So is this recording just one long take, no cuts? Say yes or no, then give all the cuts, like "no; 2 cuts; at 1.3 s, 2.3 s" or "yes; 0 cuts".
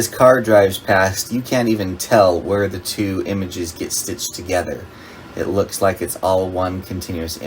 yes; 0 cuts